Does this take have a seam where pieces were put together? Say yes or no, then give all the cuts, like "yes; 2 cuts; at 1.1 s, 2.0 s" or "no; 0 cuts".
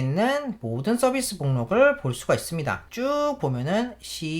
yes; 1 cut; at 2.8 s